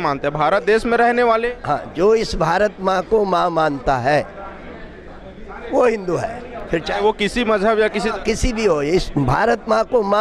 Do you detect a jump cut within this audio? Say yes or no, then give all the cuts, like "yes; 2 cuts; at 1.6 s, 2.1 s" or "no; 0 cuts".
no; 0 cuts